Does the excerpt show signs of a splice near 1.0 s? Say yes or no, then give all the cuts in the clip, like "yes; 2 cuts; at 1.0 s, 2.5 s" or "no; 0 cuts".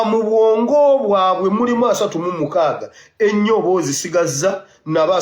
yes; 1 cut; at 1.0 s